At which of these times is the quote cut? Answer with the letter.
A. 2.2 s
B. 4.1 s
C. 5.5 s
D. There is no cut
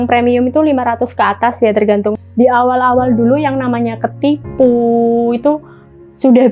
A